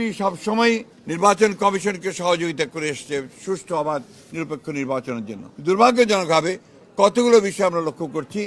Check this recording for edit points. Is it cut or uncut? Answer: cut